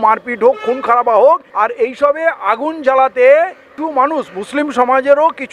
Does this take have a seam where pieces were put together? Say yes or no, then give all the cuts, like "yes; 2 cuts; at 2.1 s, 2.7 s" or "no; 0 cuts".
yes; 2 cuts; at 1.5 s, 3.7 s